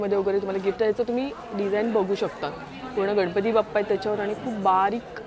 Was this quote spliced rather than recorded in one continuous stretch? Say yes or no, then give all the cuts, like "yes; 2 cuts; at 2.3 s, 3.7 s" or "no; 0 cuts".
no; 0 cuts